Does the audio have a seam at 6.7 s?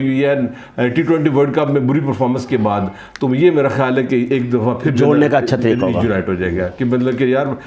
no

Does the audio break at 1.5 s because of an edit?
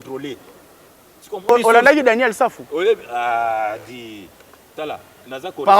yes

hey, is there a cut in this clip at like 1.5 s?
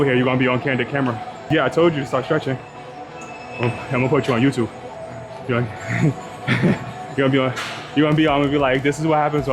yes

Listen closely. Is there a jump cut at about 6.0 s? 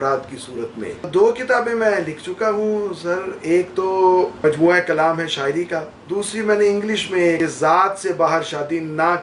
yes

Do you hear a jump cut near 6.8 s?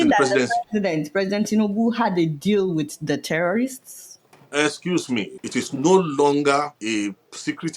yes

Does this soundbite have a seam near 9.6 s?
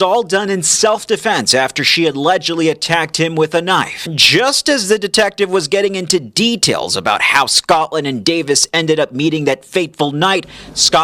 no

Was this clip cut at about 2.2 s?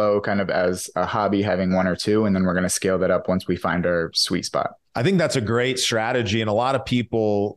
no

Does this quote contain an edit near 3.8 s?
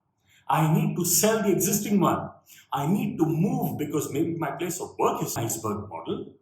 no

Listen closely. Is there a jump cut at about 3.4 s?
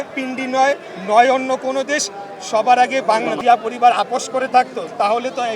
yes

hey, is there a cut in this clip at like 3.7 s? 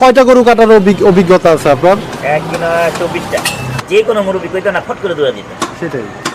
yes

